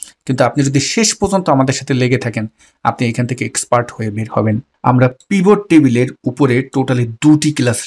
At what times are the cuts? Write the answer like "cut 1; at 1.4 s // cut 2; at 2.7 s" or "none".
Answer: cut 1; at 4.7 s